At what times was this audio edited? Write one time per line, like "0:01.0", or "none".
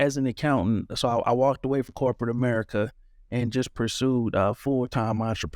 none